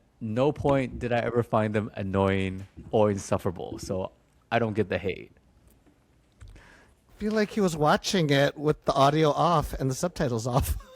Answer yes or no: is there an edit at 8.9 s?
no